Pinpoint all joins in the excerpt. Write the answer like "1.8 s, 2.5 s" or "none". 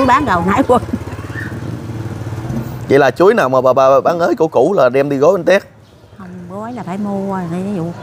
none